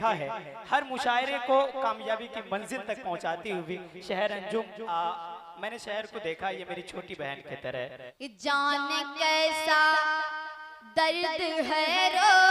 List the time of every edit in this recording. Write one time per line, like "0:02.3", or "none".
0:08.1